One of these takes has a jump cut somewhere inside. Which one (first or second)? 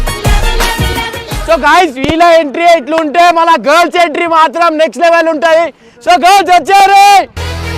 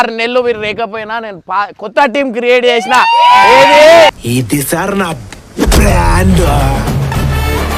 first